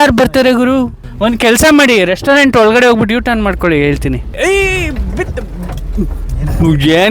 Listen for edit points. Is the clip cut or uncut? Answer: cut